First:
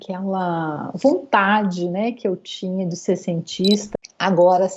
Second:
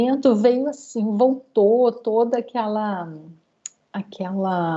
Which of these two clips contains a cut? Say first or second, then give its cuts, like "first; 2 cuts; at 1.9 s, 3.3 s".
first; 1 cut; at 3.9 s